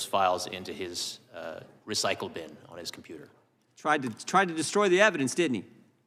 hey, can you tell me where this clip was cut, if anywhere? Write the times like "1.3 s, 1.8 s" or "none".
none